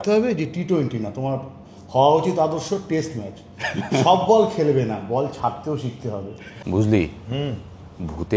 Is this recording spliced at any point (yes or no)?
yes